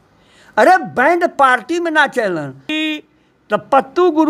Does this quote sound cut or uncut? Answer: cut